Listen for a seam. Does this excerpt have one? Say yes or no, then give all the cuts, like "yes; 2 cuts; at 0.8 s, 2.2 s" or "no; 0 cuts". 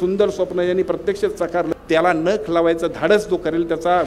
yes; 1 cut; at 1.7 s